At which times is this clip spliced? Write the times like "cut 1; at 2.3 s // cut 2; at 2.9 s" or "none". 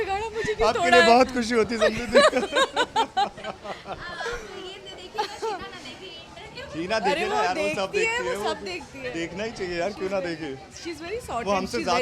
none